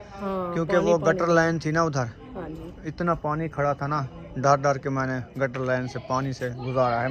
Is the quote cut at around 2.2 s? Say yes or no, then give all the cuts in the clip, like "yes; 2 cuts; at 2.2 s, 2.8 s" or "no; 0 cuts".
no; 0 cuts